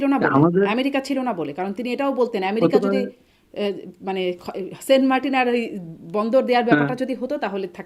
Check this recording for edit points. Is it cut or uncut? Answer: uncut